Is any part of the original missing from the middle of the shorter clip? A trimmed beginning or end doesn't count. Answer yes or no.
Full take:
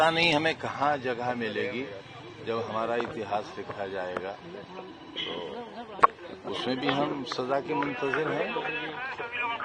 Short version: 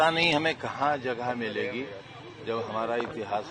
no